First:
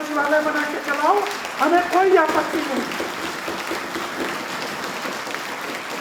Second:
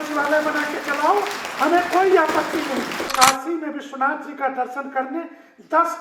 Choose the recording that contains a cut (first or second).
second